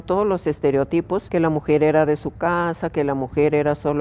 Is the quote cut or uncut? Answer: cut